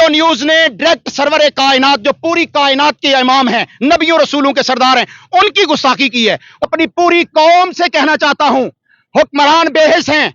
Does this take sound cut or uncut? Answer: cut